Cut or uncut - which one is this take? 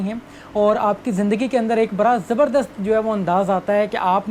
uncut